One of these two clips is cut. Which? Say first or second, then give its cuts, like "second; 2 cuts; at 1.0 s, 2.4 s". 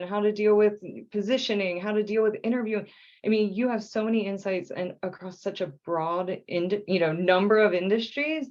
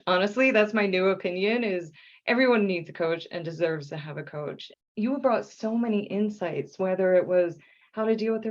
second; 1 cut; at 4.7 s